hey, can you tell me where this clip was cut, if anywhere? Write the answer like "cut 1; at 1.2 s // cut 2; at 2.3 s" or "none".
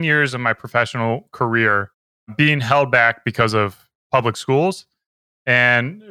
none